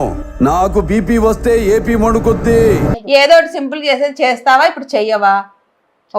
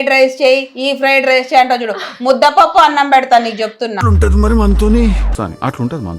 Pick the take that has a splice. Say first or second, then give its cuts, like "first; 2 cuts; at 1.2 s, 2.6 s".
first; 1 cut; at 2.9 s